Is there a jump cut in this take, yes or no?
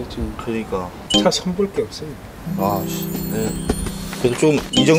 yes